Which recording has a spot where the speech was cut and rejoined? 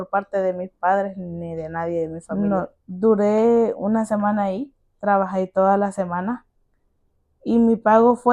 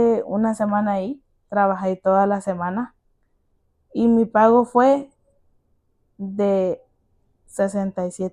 first; 1 cut; at 2.2 s

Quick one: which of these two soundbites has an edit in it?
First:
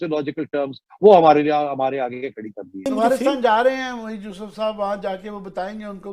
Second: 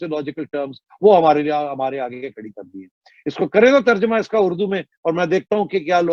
first; 1 cut; at 2.9 s

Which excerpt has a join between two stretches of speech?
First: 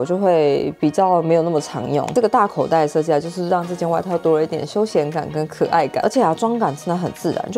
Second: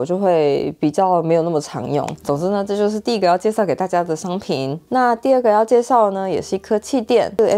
first; 2 cuts; at 2.1 s, 6.0 s

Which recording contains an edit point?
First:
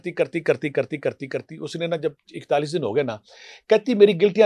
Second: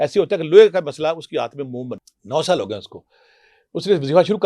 second; 1 cut; at 2.0 s

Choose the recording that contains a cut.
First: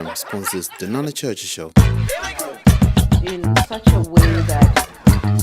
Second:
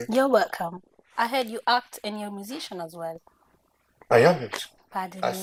first; 1 cut; at 1.7 s

